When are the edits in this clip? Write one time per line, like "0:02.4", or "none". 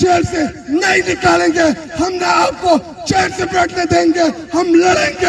none